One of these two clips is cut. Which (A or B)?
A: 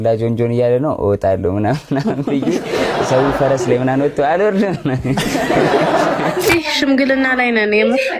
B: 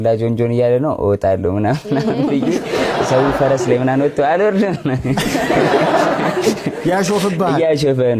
A